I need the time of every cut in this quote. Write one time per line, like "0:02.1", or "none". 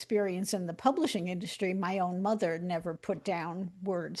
none